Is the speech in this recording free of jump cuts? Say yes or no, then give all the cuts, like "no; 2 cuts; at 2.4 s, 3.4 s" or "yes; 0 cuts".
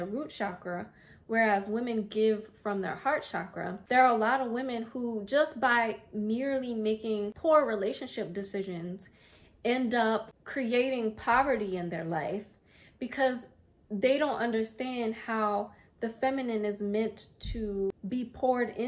no; 3 cuts; at 3.8 s, 10.4 s, 18.0 s